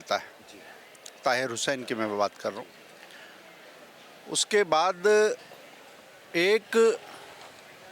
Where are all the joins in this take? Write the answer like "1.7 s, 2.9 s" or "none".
none